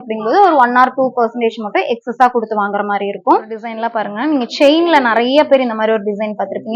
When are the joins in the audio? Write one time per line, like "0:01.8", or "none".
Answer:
0:03.7